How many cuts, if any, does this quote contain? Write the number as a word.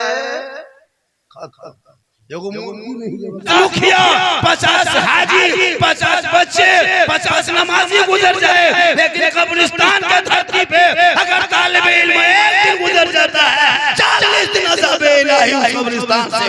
one